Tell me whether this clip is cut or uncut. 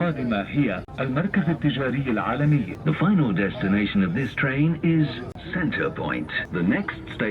cut